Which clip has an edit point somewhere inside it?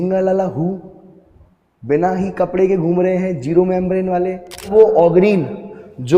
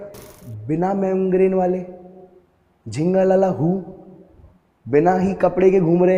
first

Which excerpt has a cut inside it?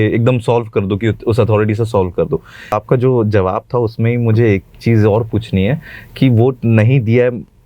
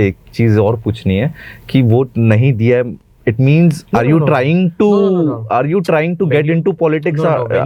first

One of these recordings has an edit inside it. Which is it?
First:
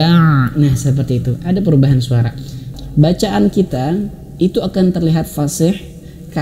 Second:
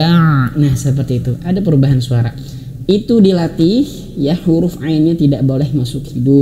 first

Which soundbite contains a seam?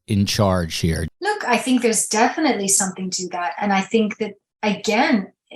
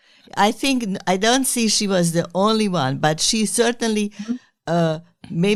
first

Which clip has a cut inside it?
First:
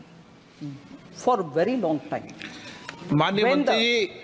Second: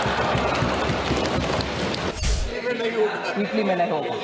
second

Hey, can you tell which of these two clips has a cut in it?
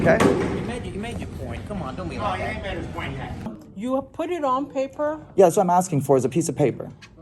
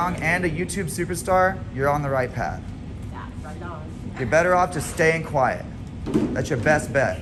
first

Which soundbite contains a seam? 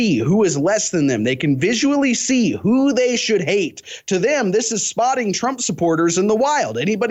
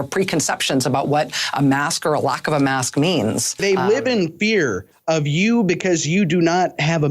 second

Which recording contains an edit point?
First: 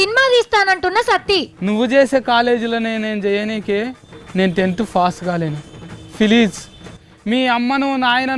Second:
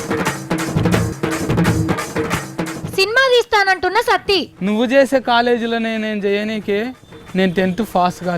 second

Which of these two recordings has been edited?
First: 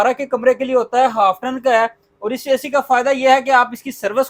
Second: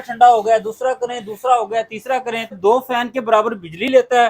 second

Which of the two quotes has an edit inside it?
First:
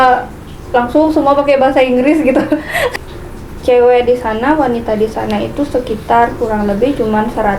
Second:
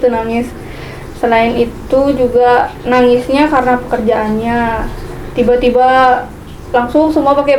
first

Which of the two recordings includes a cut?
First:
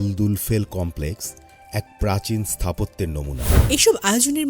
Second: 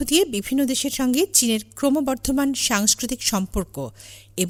first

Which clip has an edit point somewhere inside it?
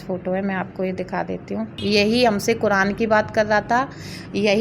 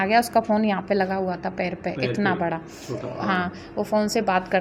first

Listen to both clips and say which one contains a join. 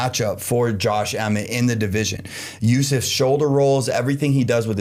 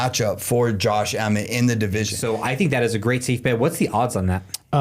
second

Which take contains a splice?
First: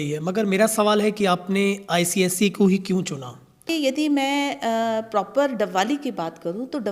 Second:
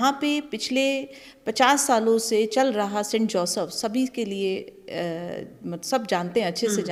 first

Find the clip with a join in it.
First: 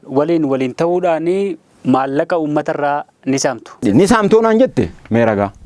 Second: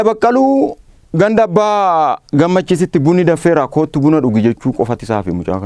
first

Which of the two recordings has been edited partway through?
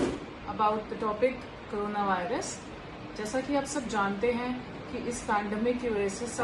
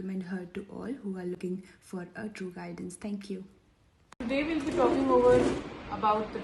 second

